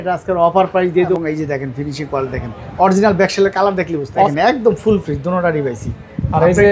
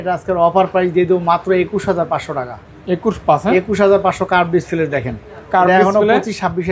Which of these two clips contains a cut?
first; 2 cuts; at 1.2 s, 4.3 s

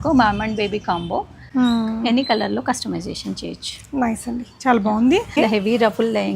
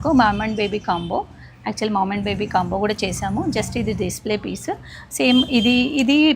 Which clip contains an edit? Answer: first; 2 cuts; at 1.4 s, 5.4 s

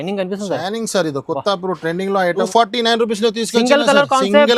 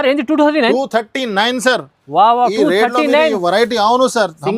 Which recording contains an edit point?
first; 1 cut; at 2.5 s

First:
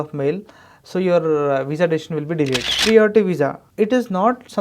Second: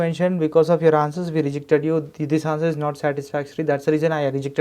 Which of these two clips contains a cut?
first; 2 cuts; at 2.7 s, 3.6 s

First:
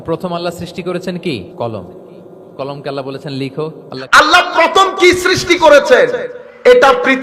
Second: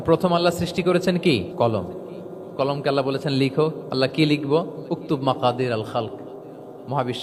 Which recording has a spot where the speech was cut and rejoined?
first; 1 cut; at 3.9 s

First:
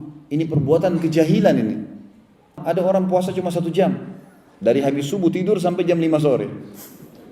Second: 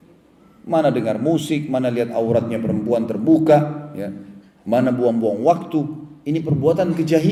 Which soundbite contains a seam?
first; 1 cut; at 2.6 s

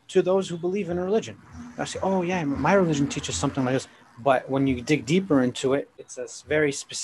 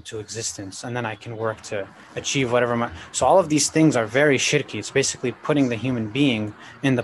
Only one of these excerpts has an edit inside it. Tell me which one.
first; 2 cuts; at 3.9 s, 6.0 s

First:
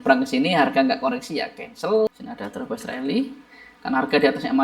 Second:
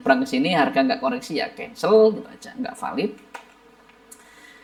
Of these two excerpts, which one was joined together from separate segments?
first; 1 cut; at 2.1 s

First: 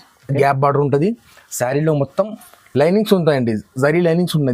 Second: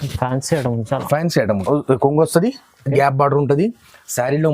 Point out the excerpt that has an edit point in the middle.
second; 1 cut; at 1.6 s

